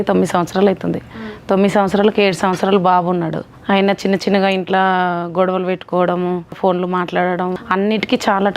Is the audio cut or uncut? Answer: cut